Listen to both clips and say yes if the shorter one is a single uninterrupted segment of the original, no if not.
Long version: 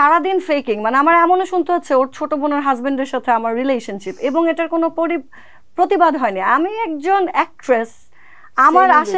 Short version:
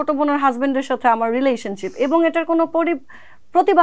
yes